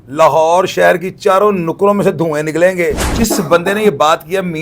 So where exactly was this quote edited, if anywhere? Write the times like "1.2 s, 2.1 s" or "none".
3.1 s